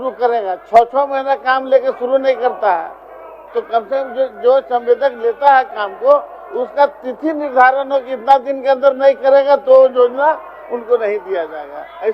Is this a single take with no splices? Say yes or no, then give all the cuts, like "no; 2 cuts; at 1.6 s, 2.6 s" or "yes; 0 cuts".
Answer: yes; 0 cuts